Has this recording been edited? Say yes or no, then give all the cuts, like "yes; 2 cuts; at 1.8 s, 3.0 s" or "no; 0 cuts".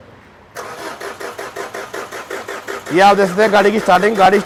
no; 0 cuts